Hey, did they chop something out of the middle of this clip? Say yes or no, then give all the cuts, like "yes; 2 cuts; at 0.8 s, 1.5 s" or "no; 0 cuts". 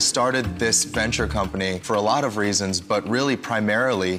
no; 0 cuts